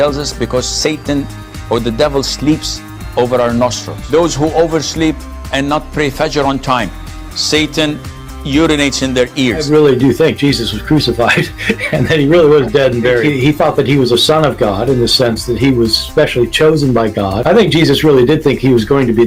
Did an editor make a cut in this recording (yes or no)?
no